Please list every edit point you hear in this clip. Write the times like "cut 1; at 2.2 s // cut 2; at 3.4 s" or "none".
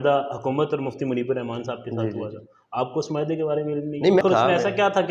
cut 1; at 4.2 s